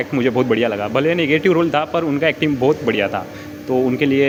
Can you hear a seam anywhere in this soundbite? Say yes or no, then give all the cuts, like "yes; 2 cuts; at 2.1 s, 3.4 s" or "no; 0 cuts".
no; 0 cuts